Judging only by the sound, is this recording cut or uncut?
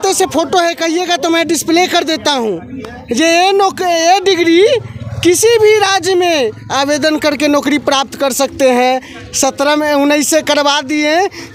uncut